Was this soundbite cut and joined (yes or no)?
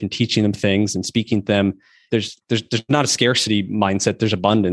yes